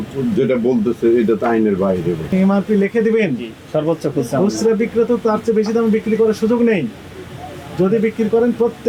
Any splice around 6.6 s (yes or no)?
no